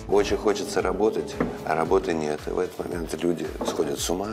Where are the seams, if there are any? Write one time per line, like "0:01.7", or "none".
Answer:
none

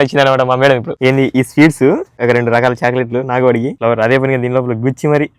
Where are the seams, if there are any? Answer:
0:00.9
0:02.1
0:03.7

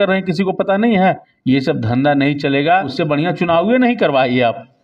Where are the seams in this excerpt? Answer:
0:01.3
0:02.9

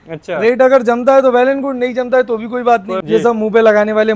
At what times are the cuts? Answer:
0:03.0

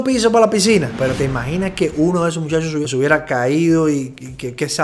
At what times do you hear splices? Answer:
0:00.9

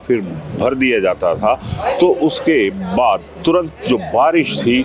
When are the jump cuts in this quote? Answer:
none

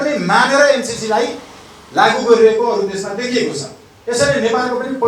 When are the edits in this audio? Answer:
none

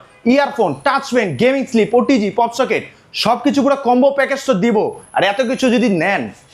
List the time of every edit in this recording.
none

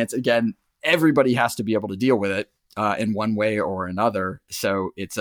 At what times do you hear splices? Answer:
none

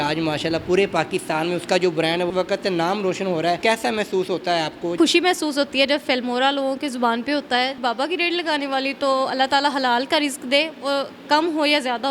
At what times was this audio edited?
0:02.3
0:03.6
0:05.0
0:07.7

